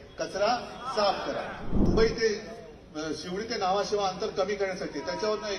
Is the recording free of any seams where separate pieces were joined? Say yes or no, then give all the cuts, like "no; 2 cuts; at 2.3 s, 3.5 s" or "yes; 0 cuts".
no; 1 cut; at 1.9 s